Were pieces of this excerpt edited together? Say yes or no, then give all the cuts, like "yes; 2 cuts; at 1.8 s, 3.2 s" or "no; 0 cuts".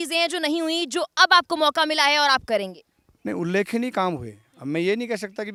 no; 0 cuts